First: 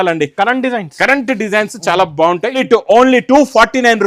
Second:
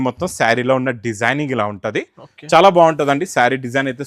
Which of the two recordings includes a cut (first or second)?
first